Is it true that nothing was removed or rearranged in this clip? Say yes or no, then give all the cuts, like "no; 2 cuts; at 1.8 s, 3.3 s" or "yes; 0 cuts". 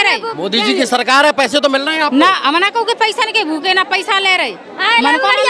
yes; 0 cuts